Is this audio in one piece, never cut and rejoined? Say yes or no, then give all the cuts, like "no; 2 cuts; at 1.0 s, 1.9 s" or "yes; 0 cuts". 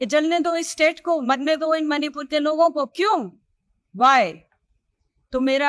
yes; 0 cuts